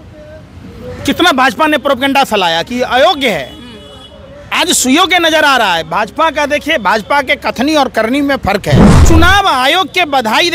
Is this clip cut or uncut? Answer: cut